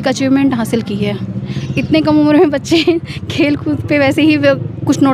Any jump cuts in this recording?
no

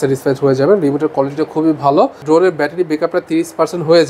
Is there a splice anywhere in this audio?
yes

